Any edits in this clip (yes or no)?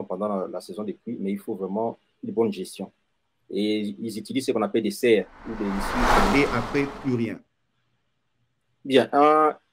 yes